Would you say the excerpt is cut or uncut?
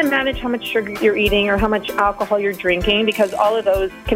cut